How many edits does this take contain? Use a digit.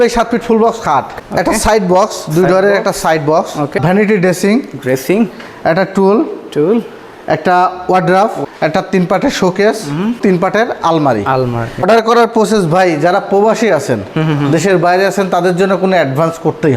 5